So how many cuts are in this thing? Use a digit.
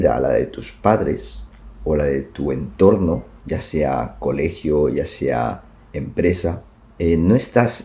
0